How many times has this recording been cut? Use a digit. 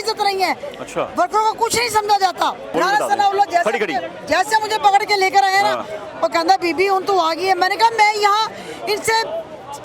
1